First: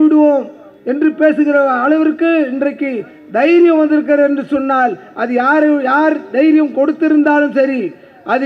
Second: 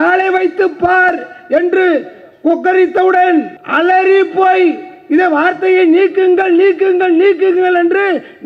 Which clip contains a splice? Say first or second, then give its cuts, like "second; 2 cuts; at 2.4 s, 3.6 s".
second; 1 cut; at 3.6 s